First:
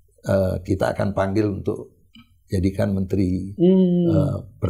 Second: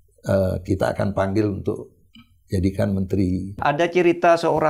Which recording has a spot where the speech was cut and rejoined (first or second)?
second